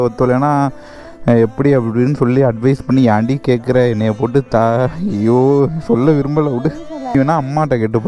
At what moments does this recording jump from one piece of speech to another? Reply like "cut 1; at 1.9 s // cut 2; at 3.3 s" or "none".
cut 1; at 7.1 s